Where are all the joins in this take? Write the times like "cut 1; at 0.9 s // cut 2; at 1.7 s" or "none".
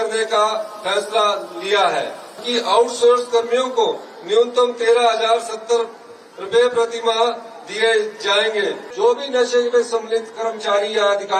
cut 1; at 2.4 s // cut 2; at 8.9 s